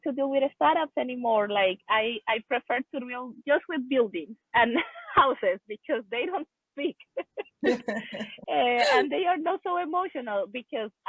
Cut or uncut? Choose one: uncut